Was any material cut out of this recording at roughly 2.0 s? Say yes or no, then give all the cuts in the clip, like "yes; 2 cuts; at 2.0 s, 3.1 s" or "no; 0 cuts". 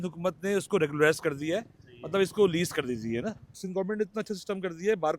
no; 1 cut; at 3.6 s